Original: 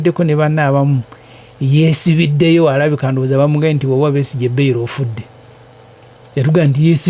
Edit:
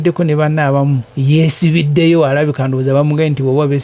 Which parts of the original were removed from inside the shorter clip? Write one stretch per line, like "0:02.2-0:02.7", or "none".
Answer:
0:01.1-0:01.5